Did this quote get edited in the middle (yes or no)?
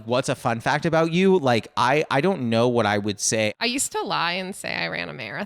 yes